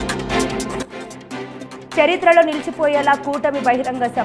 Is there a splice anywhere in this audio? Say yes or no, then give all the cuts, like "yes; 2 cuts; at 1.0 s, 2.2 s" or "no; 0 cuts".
yes; 1 cut; at 1.8 s